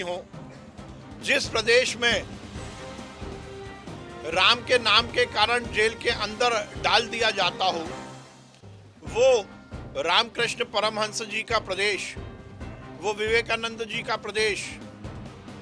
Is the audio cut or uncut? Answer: cut